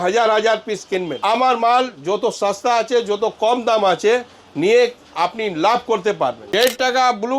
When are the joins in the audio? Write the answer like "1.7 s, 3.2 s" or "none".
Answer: 1.1 s, 6.4 s